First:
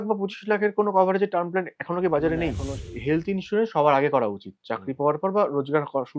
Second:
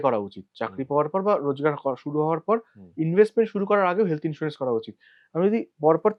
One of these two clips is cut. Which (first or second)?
first